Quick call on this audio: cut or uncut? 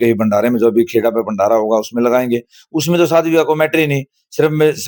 uncut